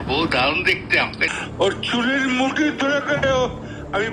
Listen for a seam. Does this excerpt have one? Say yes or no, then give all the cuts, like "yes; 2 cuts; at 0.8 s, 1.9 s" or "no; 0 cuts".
no; 0 cuts